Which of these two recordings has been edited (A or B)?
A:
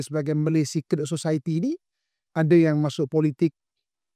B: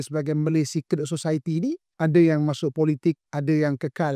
B